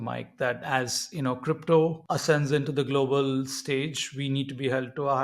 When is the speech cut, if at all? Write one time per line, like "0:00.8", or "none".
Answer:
0:02.1